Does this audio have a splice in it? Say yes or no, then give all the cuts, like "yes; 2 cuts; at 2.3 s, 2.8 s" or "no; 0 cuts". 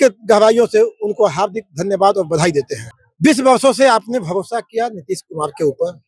yes; 1 cut; at 2.8 s